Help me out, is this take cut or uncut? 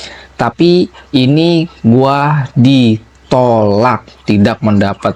uncut